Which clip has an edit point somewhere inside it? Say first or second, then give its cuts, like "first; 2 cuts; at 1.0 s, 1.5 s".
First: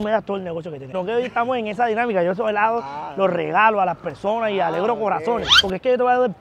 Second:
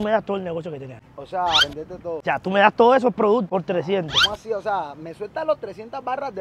first; 1 cut; at 0.9 s